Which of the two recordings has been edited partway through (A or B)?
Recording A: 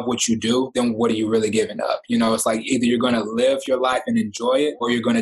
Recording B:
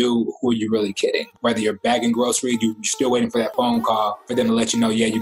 B